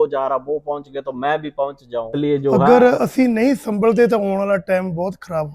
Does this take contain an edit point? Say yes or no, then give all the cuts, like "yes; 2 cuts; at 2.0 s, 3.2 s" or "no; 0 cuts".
yes; 1 cut; at 2.1 s